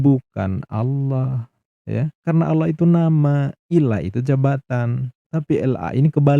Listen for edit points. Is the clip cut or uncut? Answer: uncut